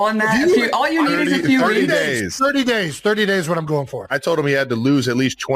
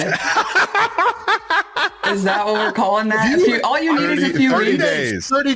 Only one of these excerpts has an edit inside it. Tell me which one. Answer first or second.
first